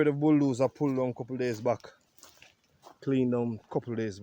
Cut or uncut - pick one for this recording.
uncut